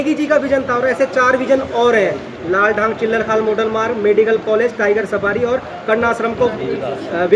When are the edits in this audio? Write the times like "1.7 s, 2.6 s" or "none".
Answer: none